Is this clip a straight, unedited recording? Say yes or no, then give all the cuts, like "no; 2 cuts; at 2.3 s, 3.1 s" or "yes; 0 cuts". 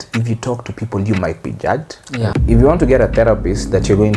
no; 1 cut; at 2.3 s